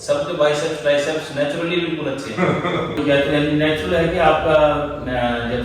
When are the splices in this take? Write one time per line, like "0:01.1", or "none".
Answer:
0:03.0